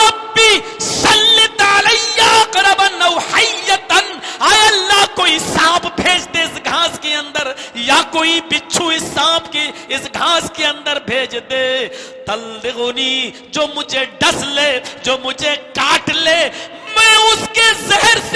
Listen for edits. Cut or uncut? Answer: uncut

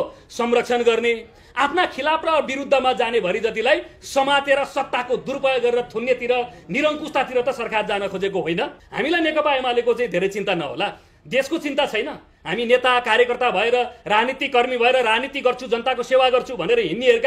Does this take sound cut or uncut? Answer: cut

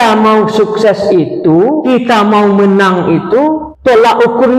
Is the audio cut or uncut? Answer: cut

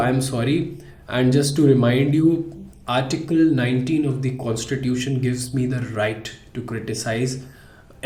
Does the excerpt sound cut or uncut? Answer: uncut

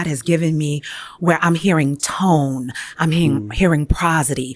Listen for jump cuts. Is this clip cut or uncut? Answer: uncut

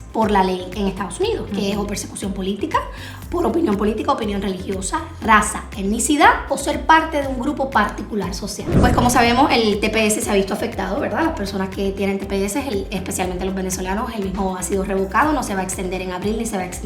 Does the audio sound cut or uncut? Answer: cut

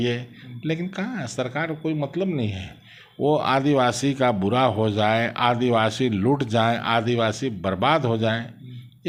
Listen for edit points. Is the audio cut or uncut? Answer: uncut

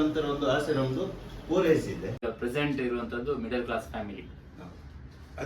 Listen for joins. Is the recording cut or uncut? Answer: cut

